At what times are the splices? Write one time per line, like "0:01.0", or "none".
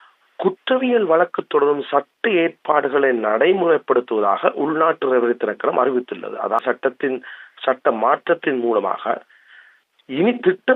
0:06.6